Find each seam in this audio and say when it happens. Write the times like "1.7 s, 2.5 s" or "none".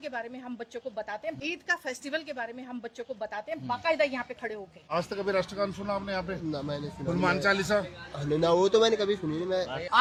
none